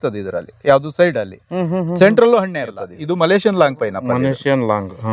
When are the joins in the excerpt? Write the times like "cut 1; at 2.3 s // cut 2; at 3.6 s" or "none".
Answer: cut 1; at 3.0 s